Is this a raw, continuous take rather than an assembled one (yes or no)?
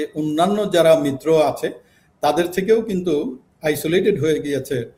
yes